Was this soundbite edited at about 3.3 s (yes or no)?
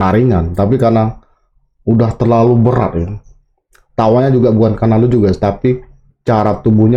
no